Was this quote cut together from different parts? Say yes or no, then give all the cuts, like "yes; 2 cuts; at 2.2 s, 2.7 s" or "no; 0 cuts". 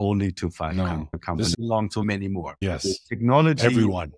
yes; 2 cuts; at 1.5 s, 2.6 s